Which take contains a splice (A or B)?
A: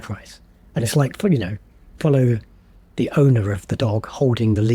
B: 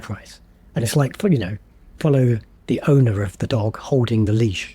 B